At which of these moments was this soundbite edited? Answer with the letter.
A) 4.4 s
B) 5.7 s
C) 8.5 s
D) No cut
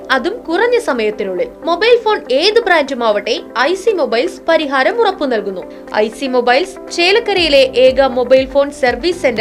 B